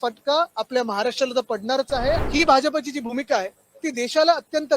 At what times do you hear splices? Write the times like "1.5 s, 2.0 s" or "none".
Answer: 2.2 s